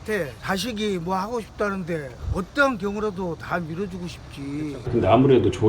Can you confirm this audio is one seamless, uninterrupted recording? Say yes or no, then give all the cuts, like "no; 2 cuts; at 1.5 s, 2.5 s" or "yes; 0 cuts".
no; 2 cuts; at 2.2 s, 4.9 s